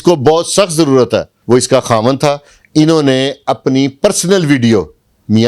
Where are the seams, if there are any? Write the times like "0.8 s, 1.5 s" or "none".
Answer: 1.3 s